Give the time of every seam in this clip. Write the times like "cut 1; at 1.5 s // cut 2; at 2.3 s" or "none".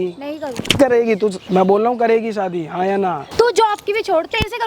cut 1; at 1.4 s // cut 2; at 3.2 s